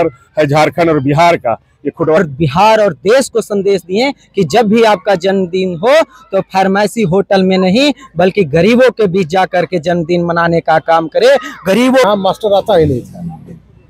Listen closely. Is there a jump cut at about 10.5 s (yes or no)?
no